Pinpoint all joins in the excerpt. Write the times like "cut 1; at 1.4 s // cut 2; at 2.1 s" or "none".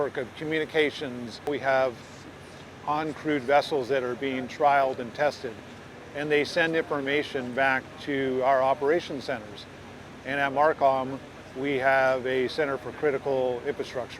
cut 1; at 1.5 s